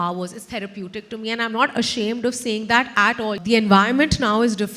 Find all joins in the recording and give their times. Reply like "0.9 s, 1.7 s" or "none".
3.4 s